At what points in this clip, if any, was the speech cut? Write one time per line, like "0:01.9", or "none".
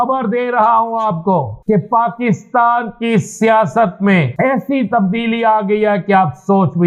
0:01.5
0:04.3